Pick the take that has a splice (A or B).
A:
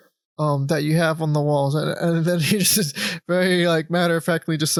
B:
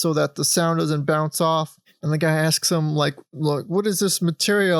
B